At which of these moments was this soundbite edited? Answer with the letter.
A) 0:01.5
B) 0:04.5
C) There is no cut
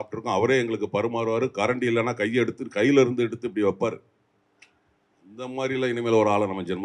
C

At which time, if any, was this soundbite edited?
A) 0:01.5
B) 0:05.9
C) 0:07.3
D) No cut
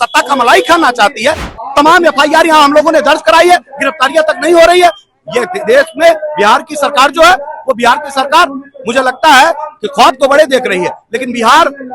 A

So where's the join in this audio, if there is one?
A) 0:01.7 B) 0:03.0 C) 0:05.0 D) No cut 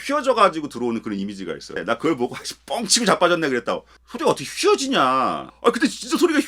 A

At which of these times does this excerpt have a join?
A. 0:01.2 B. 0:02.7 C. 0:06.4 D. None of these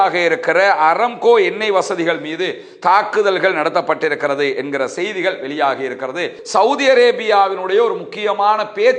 C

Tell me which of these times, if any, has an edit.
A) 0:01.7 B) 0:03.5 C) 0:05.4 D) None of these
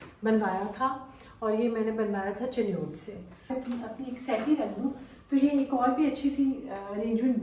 B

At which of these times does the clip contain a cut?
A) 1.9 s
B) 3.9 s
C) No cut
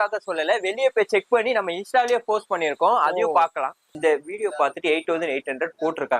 B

